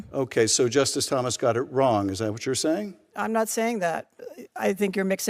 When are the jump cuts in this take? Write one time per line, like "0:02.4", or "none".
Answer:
0:04.1

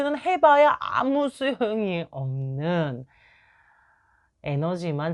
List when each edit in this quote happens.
none

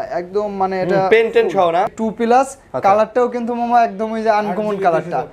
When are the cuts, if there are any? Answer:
0:01.9

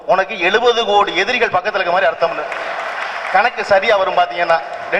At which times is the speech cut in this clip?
none

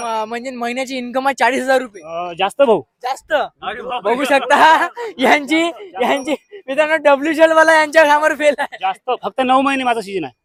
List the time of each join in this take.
none

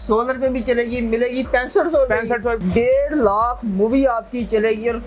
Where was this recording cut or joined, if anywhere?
0:02.6

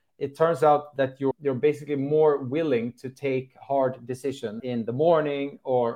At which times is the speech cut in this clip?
0:00.9
0:04.6

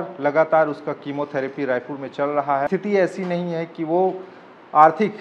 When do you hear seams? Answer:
0:02.7

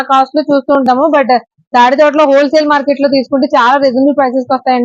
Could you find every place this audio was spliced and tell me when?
none

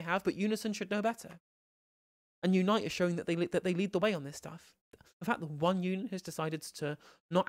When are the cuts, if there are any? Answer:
0:05.0

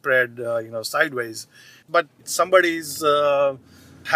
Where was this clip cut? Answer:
0:01.9

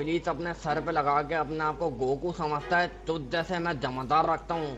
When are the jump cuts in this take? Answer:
none

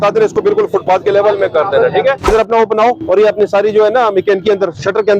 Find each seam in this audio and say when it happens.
0:02.3

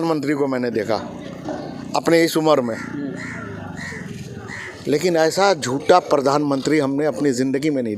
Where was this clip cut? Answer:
none

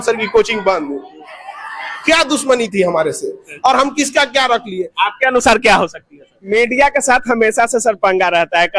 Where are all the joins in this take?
0:06.3

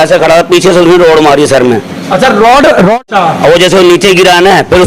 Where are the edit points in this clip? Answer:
0:03.1

